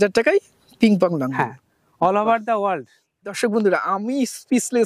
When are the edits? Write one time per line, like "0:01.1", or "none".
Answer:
0:03.4